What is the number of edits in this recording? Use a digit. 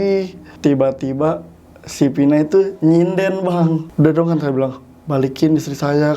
1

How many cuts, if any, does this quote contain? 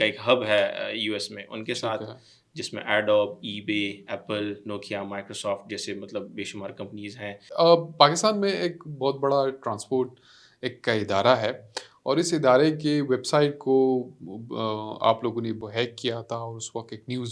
2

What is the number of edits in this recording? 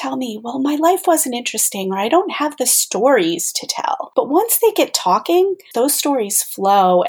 2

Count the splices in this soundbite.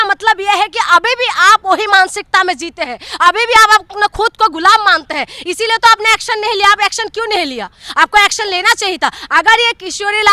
0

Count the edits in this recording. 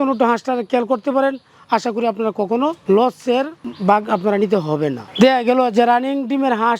1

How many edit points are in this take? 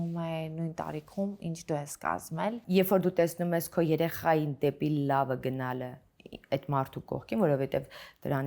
1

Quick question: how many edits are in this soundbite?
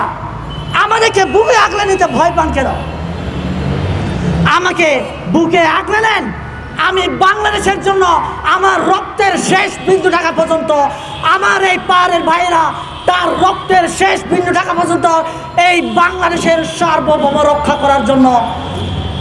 0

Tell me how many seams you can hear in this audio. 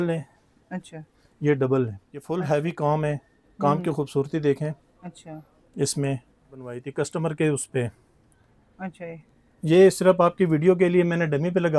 2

